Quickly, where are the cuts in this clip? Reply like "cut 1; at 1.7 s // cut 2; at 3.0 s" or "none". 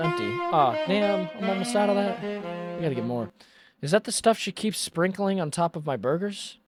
none